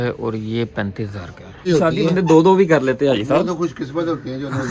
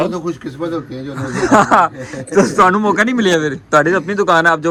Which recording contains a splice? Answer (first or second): first